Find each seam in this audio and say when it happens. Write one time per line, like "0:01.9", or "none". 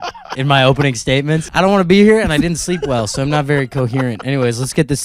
0:01.5